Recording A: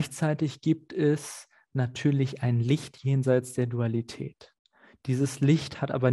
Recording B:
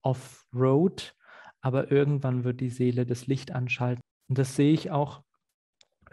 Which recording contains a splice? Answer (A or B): B